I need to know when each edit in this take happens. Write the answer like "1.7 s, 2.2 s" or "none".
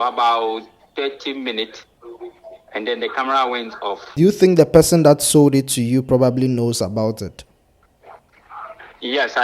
4.1 s